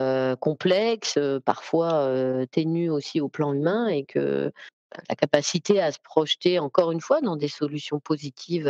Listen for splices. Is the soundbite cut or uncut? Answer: uncut